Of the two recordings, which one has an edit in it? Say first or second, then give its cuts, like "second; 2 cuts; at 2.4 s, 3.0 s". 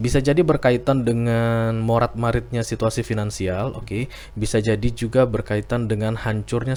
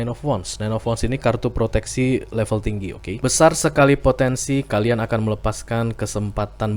second; 1 cut; at 3.2 s